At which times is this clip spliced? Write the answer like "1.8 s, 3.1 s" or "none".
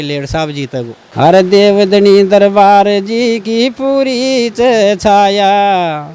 1.0 s